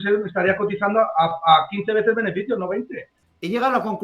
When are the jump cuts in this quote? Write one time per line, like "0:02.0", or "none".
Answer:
0:03.1